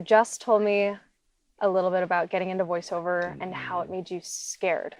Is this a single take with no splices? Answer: yes; 0 cuts

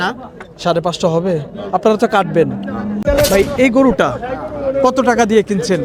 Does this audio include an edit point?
yes; 1 cut; at 3.0 s

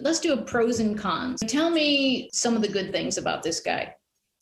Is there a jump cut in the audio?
yes; 2 cuts; at 1.4 s, 2.3 s

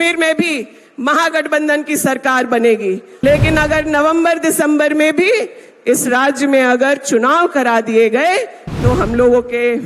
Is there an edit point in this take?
yes; 1 cut; at 3.1 s

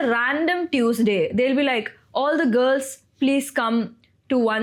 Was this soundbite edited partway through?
no; 0 cuts

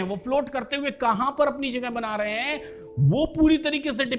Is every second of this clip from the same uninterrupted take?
yes; 0 cuts

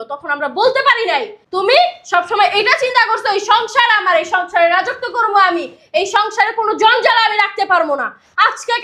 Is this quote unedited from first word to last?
no; 1 cut; at 1.4 s

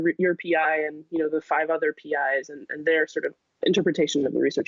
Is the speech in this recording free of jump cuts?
no; 1 cut; at 3.6 s

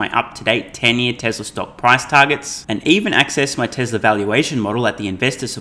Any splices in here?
no; 0 cuts

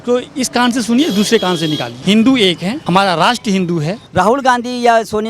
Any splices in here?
yes; 3 cuts; at 1.9 s, 2.8 s, 4.0 s

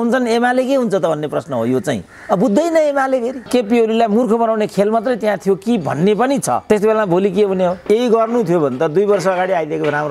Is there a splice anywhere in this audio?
yes; 2 cuts; at 3.5 s, 7.8 s

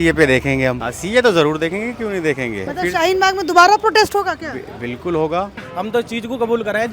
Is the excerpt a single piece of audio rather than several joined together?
no; 3 cuts; at 0.9 s, 2.7 s, 5.6 s

